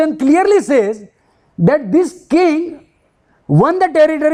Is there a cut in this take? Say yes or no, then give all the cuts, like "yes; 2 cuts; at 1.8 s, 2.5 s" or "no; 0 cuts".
no; 0 cuts